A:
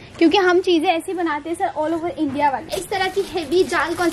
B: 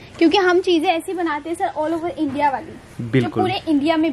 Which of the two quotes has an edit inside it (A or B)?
A